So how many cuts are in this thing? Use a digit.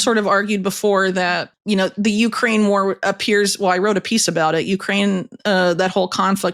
1